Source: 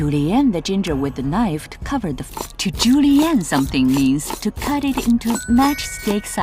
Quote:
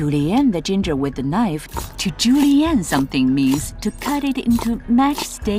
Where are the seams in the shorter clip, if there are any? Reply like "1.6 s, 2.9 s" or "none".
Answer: 1.7 s